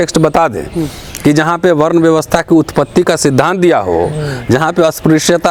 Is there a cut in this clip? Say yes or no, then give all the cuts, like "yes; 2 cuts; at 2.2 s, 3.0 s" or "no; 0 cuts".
no; 0 cuts